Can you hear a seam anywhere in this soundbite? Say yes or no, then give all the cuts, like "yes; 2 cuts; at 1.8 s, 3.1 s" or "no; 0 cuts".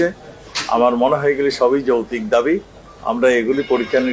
no; 0 cuts